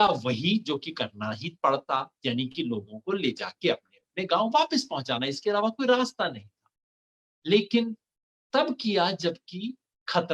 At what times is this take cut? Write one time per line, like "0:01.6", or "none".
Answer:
none